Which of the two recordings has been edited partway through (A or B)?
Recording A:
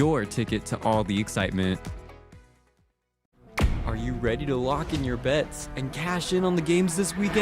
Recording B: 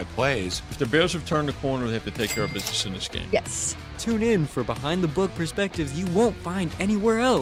A